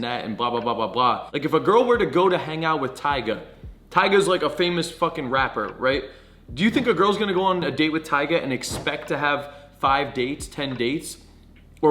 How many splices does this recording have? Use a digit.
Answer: 1